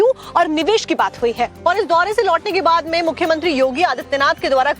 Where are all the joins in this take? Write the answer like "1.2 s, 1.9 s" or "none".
3.1 s